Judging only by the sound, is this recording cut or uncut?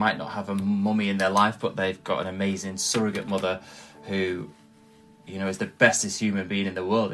uncut